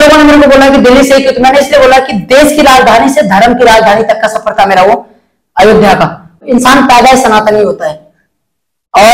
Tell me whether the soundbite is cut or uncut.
cut